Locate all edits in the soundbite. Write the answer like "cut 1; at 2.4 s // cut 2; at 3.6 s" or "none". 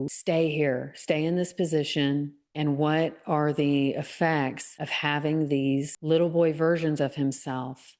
none